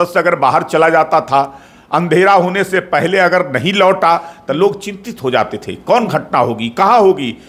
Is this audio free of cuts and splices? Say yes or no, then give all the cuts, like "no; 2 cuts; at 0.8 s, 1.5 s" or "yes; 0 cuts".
yes; 0 cuts